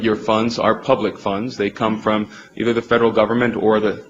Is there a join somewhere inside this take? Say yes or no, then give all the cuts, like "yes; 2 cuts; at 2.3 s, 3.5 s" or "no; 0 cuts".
no; 0 cuts